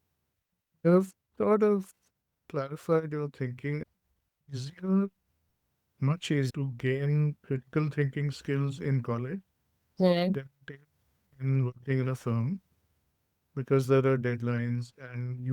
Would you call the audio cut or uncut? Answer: cut